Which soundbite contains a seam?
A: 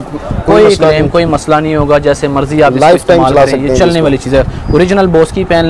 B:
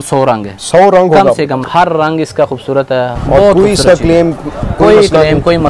B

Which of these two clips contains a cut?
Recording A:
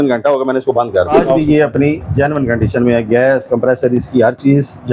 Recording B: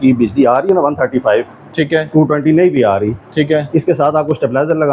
A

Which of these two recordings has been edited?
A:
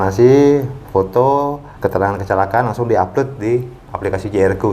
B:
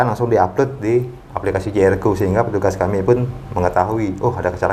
A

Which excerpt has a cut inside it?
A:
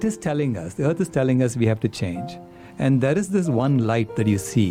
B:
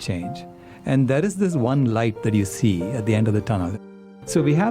B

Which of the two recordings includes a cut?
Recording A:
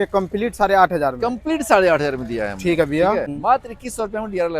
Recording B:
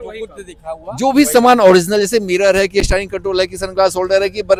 A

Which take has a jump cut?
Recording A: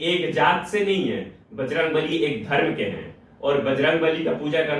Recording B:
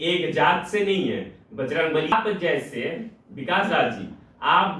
B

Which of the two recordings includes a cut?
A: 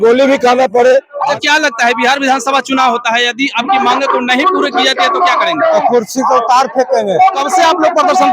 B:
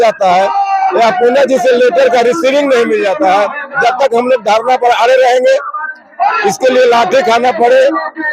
A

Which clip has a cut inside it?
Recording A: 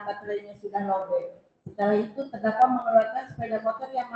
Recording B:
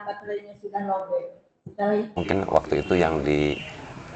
B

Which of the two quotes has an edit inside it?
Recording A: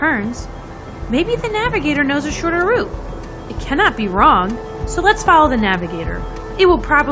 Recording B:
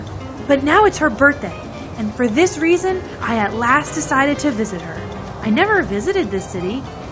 B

